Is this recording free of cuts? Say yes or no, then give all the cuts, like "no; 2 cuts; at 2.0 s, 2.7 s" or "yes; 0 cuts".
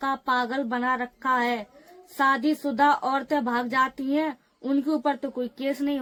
yes; 0 cuts